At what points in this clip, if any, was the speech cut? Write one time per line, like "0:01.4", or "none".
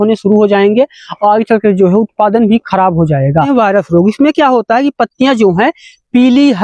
0:03.5